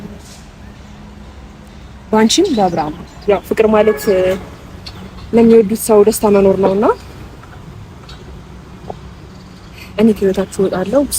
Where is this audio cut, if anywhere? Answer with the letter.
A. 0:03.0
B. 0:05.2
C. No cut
A